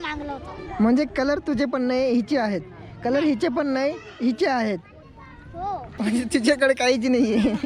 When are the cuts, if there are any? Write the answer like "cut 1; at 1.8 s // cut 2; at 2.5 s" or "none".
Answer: cut 1; at 5.9 s